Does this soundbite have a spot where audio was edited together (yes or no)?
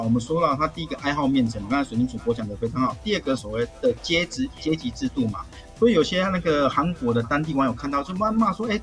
no